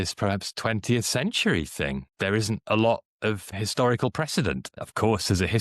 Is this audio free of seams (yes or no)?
no